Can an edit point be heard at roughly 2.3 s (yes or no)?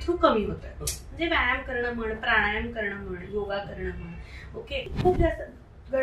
no